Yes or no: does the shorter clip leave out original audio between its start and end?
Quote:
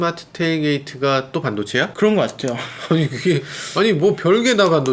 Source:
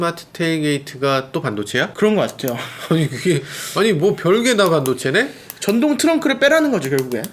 no